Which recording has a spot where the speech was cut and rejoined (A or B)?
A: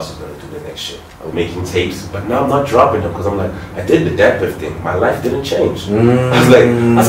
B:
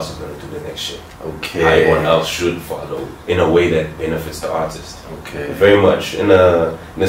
A